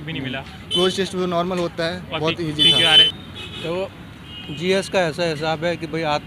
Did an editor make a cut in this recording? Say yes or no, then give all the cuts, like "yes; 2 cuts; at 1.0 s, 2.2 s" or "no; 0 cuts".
yes; 1 cut; at 3.1 s